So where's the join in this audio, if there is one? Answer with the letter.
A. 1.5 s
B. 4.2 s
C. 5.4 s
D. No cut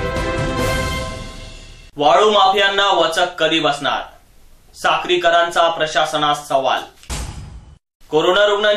A